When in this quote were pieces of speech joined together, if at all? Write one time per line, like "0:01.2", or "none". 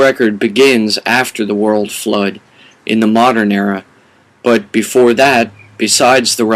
none